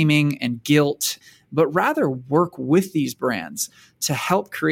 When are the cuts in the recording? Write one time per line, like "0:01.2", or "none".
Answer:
0:01.2
0:03.7